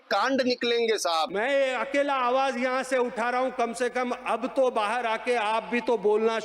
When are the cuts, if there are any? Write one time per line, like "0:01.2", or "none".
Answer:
0:01.3